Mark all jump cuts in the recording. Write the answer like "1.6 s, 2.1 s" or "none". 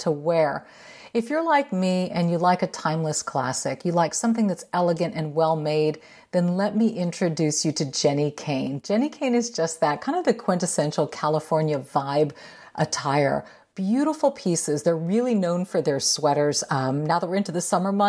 none